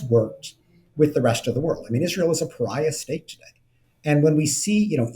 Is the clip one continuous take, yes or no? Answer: yes